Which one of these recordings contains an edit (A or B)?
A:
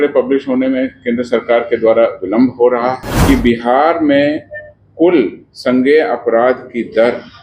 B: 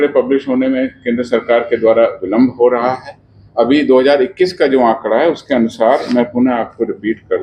A